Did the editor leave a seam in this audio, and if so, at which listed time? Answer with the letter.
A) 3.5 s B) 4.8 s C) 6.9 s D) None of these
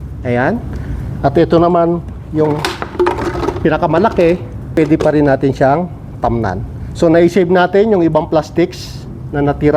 B